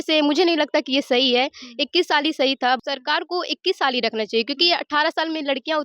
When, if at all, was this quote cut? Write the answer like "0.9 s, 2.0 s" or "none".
2.8 s